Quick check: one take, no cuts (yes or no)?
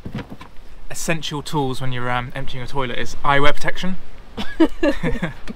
yes